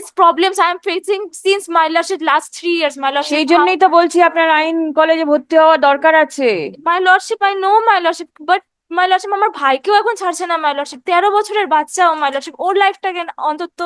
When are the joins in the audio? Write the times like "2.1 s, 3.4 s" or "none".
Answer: none